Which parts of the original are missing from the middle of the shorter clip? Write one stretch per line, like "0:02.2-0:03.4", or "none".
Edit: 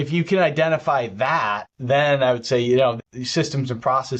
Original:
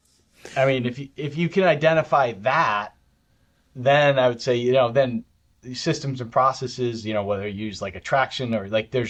0:02.9-0:03.6
0:04.9-0:05.5